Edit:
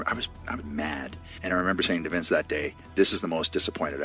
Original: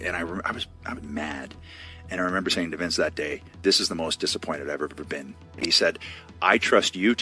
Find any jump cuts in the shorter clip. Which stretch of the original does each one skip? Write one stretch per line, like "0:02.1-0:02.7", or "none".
0:01.6-0:01.9